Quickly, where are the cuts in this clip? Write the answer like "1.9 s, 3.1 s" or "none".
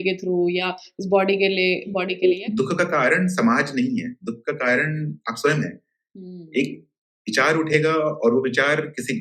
2.3 s

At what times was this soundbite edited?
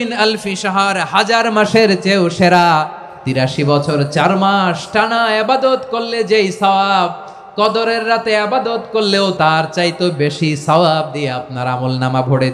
3.4 s, 9.4 s

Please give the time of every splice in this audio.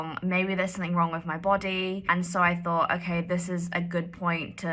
2.0 s

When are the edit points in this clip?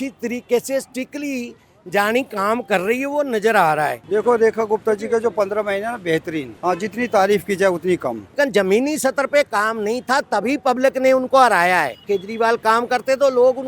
4.0 s, 6.5 s, 8.4 s, 12.0 s

